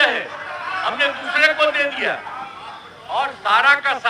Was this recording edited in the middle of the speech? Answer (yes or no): no